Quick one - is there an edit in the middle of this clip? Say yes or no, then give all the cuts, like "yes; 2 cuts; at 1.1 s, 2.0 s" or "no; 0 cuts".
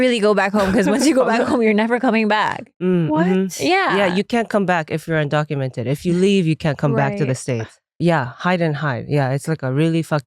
yes; 1 cut; at 8.0 s